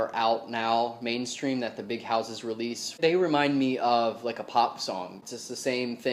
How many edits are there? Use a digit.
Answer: 2